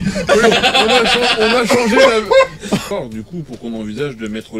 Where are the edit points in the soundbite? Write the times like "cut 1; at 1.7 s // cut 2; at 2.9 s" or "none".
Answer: cut 1; at 2.9 s